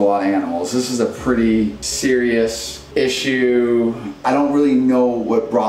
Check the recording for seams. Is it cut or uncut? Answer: cut